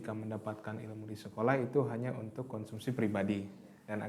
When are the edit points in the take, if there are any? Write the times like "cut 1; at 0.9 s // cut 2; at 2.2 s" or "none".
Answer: none

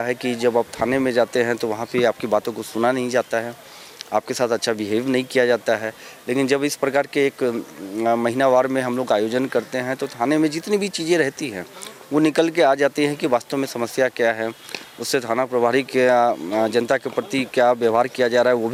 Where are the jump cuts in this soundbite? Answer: none

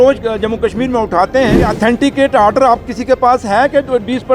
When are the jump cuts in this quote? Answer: cut 1; at 1.7 s

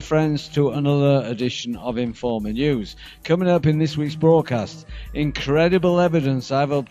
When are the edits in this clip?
cut 1; at 3.9 s

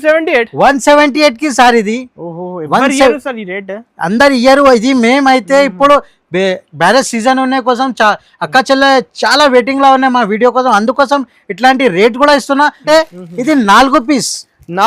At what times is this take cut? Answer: cut 1; at 12.8 s

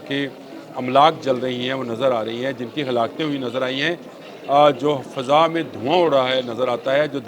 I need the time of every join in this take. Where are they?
none

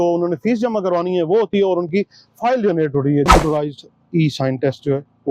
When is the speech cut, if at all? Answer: cut 1; at 3.3 s

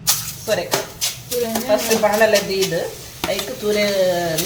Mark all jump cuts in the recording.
none

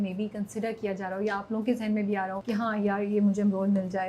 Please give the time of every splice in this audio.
cut 1; at 2.4 s

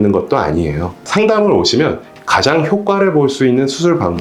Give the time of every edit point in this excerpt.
cut 1; at 1.0 s // cut 2; at 2.0 s

